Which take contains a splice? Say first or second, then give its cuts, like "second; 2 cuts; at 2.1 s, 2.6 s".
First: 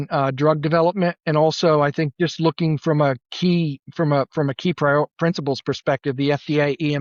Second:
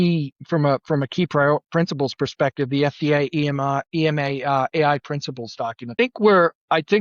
second; 1 cut; at 6.0 s